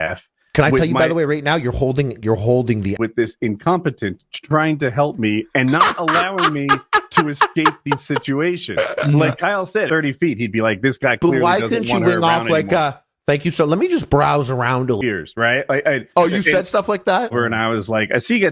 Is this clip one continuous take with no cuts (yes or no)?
no